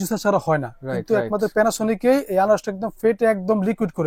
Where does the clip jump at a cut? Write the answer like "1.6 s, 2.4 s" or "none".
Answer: none